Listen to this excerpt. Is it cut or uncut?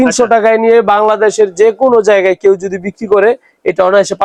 uncut